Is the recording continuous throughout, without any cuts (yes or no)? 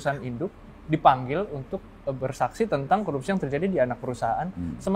yes